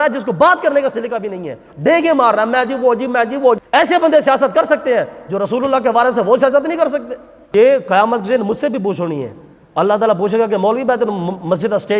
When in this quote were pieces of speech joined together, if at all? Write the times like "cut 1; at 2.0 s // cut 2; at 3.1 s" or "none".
cut 1; at 3.6 s // cut 2; at 7.3 s